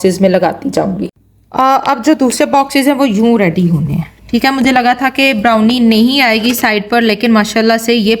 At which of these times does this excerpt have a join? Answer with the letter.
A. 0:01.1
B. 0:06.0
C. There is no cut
A